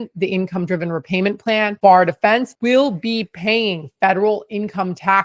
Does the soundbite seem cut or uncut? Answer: uncut